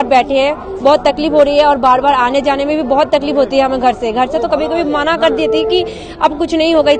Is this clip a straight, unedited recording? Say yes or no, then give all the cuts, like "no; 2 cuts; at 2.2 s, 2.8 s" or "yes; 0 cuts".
yes; 0 cuts